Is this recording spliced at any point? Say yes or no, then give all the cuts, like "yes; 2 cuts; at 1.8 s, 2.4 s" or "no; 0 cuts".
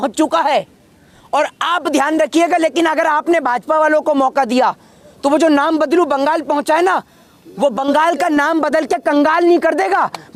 no; 0 cuts